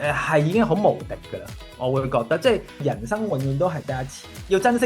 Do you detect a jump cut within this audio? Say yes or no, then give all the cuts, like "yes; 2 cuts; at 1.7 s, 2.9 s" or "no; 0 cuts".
yes; 1 cut; at 2.8 s